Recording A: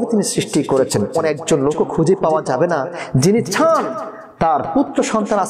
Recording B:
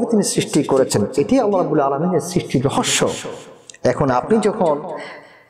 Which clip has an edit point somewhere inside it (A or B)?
A